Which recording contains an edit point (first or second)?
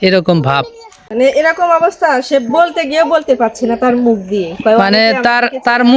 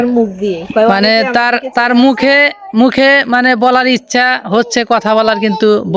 first